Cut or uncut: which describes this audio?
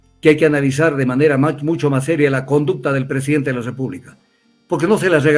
uncut